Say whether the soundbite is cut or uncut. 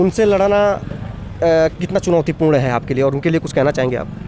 uncut